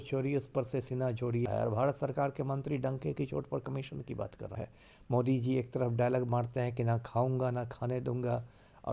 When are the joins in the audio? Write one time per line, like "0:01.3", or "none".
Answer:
0:01.5
0:04.5

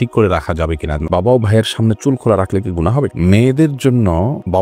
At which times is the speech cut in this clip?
0:01.1
0:03.1

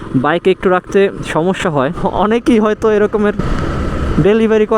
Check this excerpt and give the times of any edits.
0:02.0

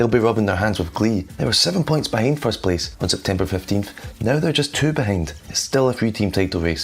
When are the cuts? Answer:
0:01.3
0:02.9
0:05.5

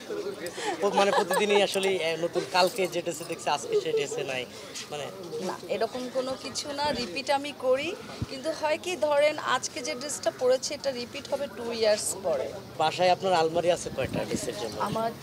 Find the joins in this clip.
0:12.7

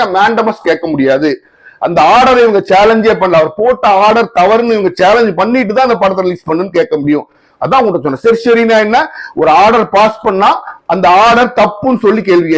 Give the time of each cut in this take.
none

